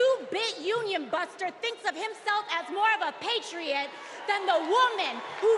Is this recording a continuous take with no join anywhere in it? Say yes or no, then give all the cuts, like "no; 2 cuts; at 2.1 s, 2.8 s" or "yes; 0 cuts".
yes; 0 cuts